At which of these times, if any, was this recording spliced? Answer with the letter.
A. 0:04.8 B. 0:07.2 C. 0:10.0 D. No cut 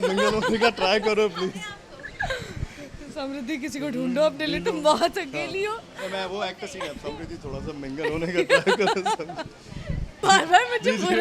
C